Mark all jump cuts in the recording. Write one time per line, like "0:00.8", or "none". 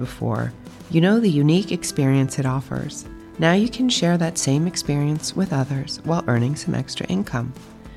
none